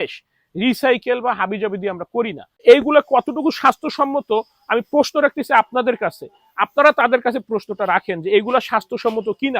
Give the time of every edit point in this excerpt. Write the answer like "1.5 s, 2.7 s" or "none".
2.6 s